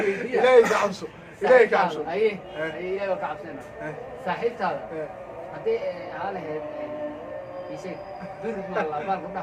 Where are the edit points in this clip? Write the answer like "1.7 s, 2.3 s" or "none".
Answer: none